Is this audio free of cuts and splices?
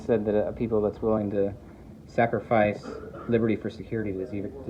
yes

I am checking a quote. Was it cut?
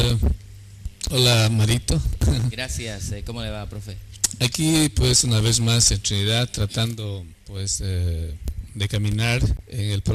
no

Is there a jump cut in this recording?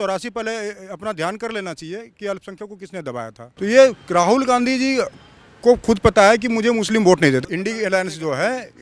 no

